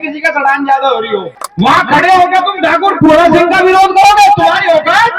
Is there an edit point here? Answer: yes; 1 cut; at 1.4 s

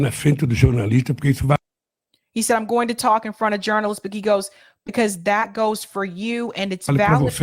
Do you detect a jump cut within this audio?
no; 0 cuts

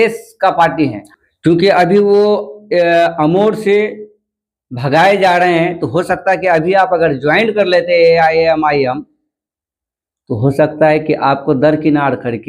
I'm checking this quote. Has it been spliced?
yes; 1 cut; at 1.1 s

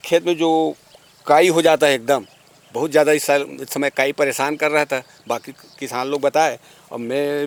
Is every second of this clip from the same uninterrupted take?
yes; 0 cuts

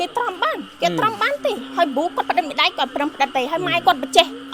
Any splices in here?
no; 0 cuts

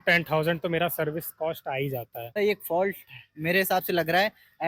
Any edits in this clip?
yes; 1 cut; at 2.4 s

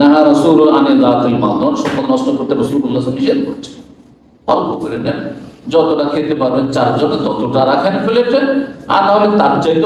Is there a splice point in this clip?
no; 0 cuts

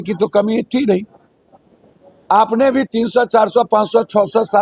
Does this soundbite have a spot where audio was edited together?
no; 0 cuts

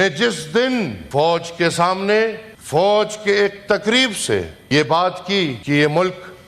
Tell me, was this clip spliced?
yes; 4 cuts; at 1.0 s, 2.5 s, 4.6 s, 5.6 s

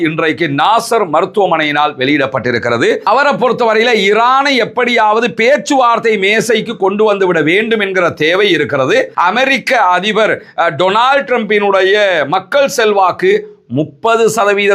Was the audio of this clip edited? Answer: yes; 2 cuts; at 3.0 s, 9.1 s

